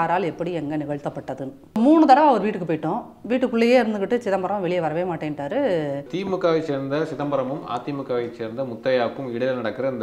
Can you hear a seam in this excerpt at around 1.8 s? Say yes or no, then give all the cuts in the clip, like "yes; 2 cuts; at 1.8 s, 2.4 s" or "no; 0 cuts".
yes; 2 cuts; at 1.8 s, 6.1 s